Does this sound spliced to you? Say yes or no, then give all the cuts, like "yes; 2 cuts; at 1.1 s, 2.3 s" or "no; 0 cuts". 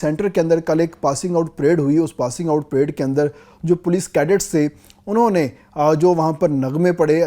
no; 0 cuts